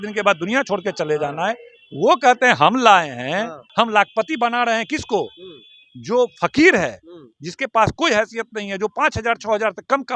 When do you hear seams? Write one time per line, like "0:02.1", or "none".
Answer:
0:03.6